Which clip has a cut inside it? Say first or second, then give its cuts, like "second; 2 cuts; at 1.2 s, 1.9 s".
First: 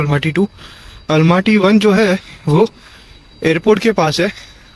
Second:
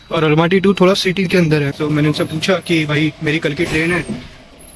second; 1 cut; at 1.7 s